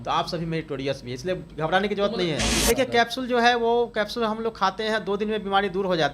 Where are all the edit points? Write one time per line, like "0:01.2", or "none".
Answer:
0:02.5